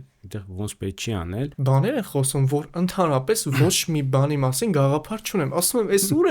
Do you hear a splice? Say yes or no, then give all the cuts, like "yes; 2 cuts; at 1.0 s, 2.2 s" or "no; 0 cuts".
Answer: yes; 1 cut; at 1.5 s